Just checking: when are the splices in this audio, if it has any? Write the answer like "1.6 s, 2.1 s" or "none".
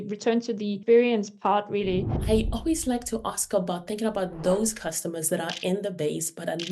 0.8 s, 2.2 s